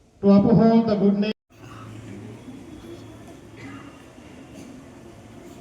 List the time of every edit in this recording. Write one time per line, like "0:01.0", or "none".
0:01.4

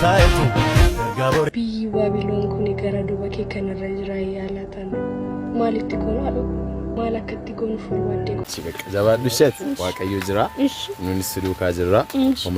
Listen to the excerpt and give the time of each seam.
0:08.4

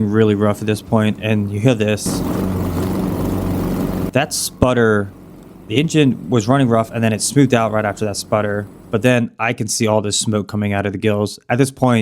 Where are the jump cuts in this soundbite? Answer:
0:02.0

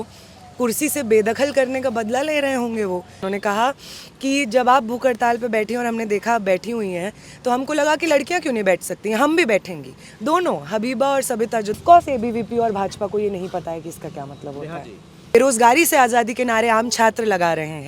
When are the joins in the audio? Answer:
0:03.2
0:11.8
0:15.3

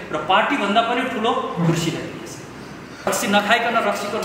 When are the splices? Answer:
0:03.1

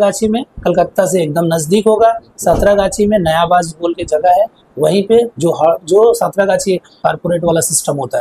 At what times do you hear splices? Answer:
0:07.0

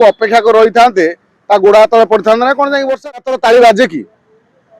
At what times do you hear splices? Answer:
0:03.3

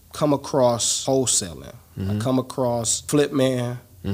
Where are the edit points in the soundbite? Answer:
0:00.9
0:03.0

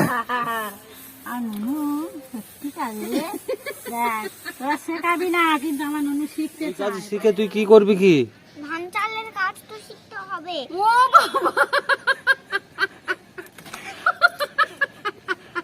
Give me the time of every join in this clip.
0:07.1

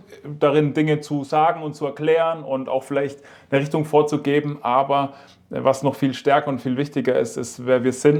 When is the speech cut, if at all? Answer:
none

